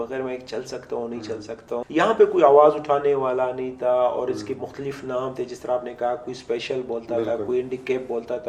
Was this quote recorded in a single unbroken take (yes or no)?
no